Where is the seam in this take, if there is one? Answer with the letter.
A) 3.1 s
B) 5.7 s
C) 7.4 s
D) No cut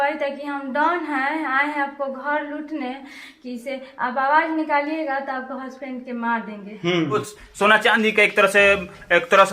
C